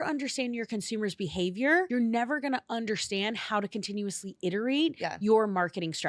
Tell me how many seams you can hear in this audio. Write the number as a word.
one